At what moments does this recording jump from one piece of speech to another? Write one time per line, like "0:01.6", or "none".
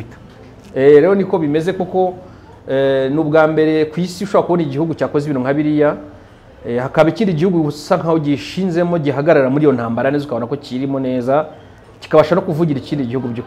none